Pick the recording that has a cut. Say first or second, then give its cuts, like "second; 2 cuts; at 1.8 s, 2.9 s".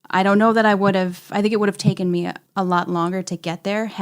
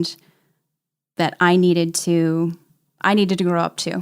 first; 1 cut; at 2.4 s